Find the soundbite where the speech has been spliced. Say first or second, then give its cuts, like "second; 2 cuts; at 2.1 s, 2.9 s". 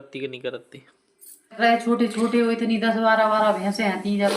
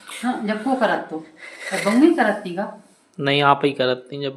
first; 1 cut; at 1.6 s